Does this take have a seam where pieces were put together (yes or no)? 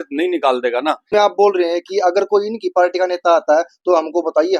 yes